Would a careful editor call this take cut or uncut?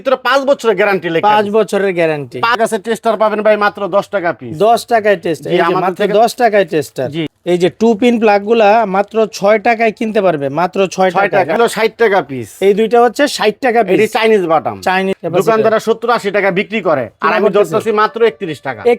cut